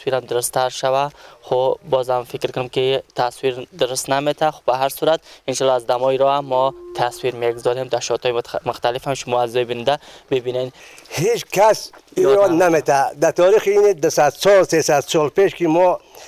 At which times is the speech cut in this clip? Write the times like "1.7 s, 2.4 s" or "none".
10.8 s